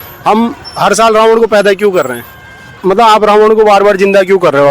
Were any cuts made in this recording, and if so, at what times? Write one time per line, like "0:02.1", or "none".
0:02.7